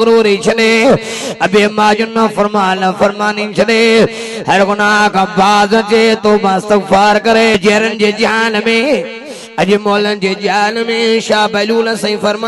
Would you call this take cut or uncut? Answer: cut